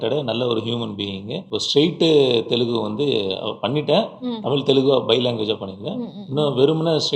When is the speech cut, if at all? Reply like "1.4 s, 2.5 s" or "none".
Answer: 1.4 s